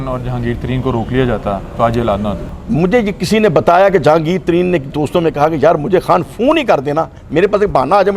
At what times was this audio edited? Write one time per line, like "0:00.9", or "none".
0:02.5